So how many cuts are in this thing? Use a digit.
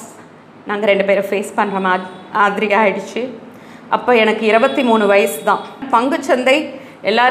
1